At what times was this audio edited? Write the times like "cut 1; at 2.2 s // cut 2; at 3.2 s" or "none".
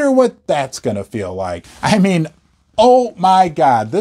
cut 1; at 1.6 s